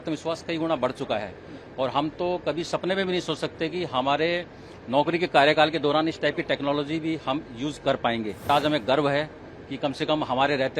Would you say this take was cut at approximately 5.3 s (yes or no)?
no